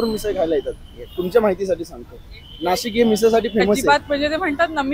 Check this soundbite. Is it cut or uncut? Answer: cut